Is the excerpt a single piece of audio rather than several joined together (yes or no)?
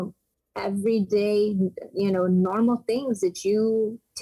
yes